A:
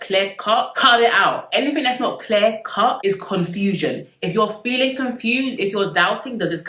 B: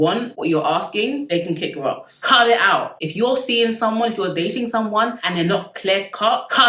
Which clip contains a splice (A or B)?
B